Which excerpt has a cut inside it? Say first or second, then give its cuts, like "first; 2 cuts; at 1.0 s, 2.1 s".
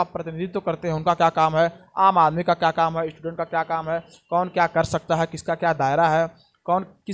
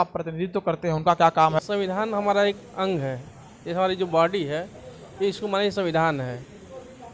second; 1 cut; at 1.6 s